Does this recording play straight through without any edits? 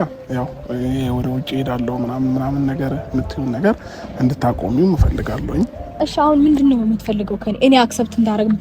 no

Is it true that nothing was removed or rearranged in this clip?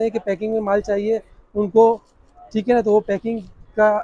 yes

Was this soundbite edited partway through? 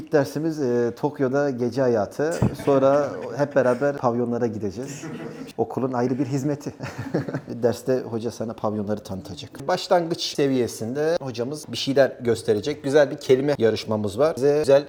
no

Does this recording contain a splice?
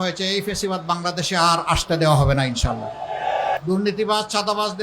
yes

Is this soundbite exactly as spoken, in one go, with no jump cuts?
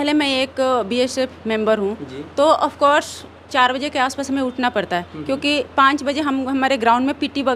yes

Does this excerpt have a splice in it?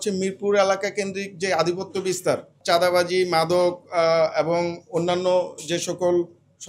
yes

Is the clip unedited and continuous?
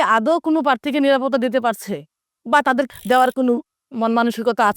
no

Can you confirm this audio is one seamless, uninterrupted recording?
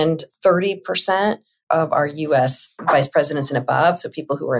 yes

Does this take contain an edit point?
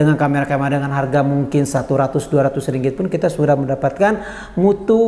no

